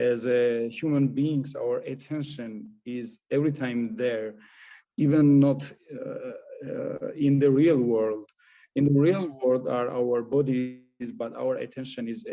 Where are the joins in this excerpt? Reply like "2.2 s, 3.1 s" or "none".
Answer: none

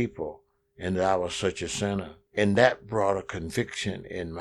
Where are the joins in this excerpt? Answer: 2.2 s

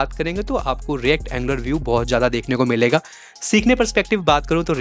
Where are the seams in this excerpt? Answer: none

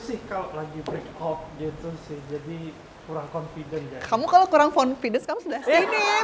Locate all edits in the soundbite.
none

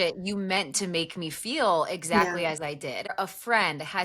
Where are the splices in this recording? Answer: 3.1 s

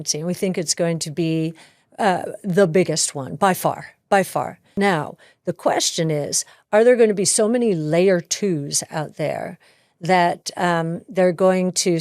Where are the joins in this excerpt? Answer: 4.6 s

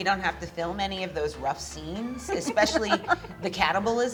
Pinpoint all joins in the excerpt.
none

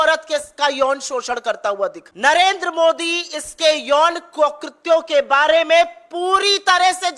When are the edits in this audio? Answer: 2.0 s

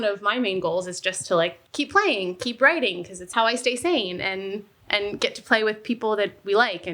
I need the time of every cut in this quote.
1.6 s, 3.2 s

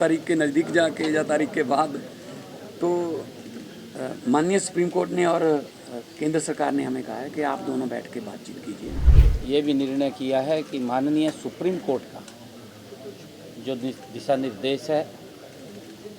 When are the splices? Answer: 9.1 s

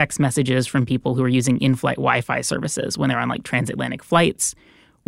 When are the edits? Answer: none

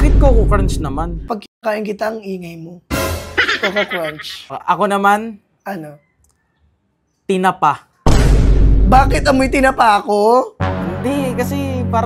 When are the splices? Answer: 1.2 s, 4.6 s

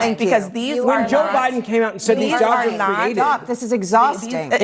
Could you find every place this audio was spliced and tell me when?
1.4 s

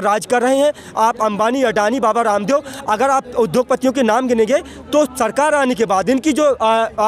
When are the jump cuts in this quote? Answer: none

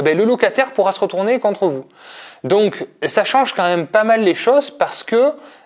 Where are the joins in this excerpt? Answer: none

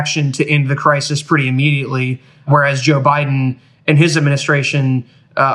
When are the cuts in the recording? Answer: 2.5 s

